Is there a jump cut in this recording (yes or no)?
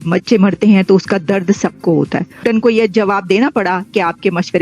yes